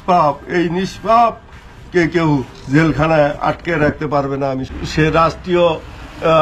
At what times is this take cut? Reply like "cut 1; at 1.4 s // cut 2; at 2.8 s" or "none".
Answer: cut 1; at 4.7 s